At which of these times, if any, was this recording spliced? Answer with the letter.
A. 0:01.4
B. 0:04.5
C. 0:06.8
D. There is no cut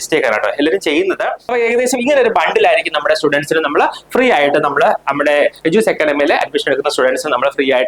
A